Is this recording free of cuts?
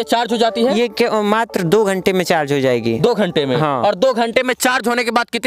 yes; 0 cuts

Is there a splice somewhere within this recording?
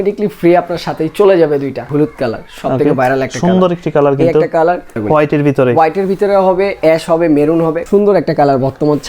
yes; 3 cuts; at 1.9 s, 5.0 s, 7.8 s

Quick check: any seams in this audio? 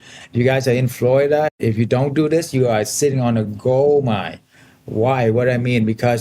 yes; 1 cut; at 1.5 s

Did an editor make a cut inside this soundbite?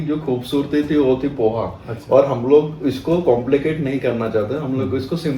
no; 0 cuts

